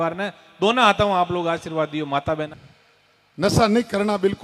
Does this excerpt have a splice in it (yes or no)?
yes